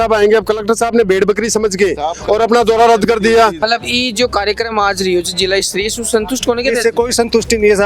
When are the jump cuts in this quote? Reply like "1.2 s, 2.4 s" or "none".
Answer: 3.6 s